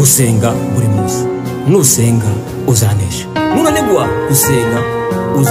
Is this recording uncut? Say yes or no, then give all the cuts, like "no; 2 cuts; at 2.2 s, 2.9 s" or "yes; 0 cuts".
yes; 0 cuts